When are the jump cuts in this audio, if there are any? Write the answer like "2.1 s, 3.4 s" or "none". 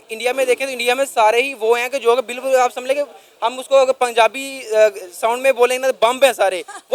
none

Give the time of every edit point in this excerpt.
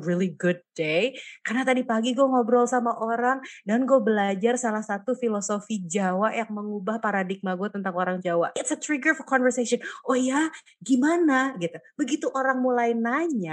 8.6 s

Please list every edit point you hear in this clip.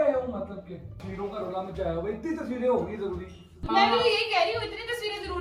1.0 s, 3.6 s

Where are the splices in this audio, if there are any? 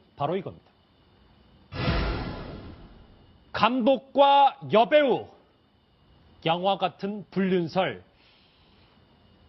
none

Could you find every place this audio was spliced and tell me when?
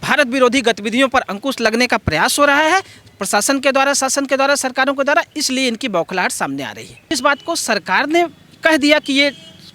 7.1 s

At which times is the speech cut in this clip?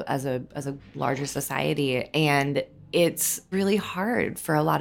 3.4 s

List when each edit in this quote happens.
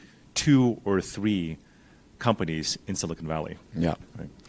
none

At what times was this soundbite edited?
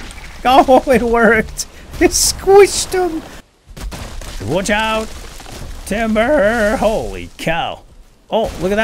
3.6 s

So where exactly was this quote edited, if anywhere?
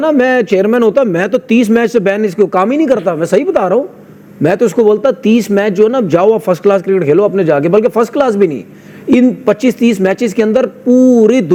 none

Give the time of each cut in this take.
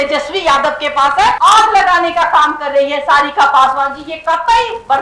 1.4 s

